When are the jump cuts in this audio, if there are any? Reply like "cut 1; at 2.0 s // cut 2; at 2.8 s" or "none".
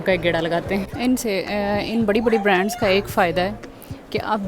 cut 1; at 0.9 s